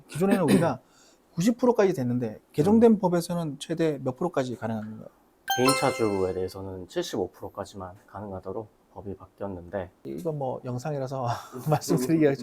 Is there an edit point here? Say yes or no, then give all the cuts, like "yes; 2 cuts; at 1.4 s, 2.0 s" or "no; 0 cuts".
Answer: yes; 1 cut; at 10.0 s